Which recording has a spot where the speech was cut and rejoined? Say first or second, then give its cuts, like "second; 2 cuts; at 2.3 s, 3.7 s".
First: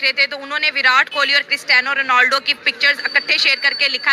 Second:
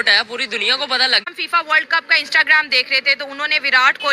second; 1 cut; at 1.2 s